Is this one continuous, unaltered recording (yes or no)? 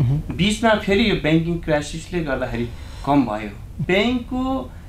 no